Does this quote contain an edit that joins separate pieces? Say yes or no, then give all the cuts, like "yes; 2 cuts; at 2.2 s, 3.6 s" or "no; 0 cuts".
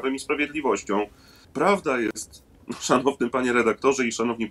yes; 1 cut; at 1.4 s